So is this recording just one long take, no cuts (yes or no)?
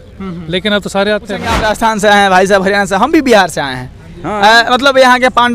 no